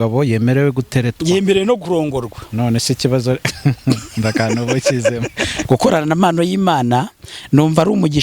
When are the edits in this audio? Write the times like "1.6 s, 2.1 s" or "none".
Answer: 5.6 s